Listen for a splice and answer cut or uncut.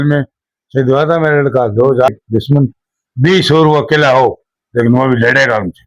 cut